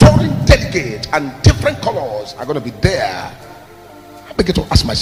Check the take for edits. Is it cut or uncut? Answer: uncut